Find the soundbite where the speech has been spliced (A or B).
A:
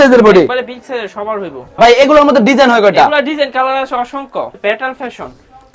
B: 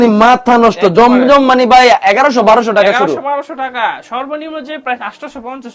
A